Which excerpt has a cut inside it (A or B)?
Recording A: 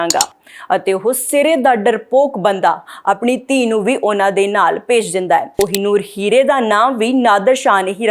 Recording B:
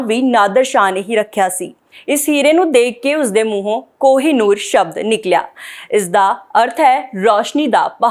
A